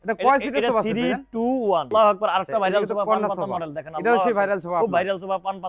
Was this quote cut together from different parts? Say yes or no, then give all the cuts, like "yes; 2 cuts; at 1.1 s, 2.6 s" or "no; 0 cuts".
yes; 1 cut; at 1.9 s